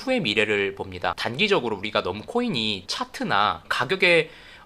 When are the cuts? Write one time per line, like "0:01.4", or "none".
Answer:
none

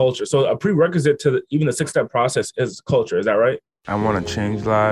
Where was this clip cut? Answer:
0:03.7

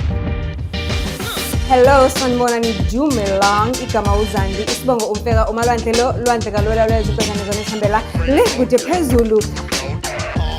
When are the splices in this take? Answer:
none

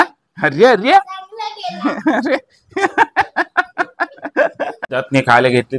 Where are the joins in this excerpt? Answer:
0:04.8

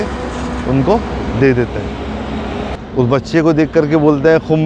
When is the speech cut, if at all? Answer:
0:02.6

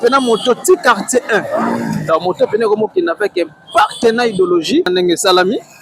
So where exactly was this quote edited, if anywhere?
0:04.9

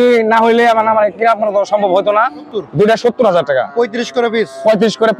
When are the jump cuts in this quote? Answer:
0:02.5

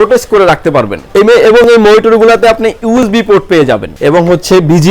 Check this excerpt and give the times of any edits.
0:01.0
0:03.9

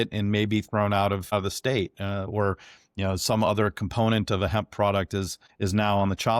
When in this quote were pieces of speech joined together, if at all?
0:05.4

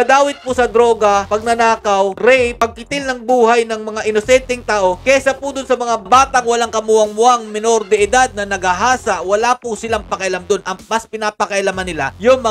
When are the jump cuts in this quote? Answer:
none

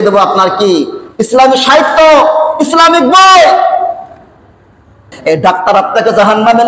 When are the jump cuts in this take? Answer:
0:05.1

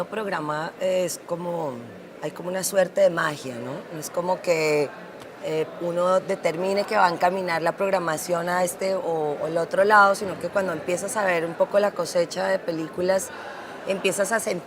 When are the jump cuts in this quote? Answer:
none

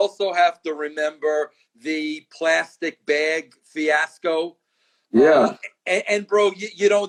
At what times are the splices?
none

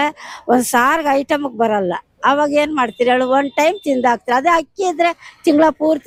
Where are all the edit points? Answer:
none

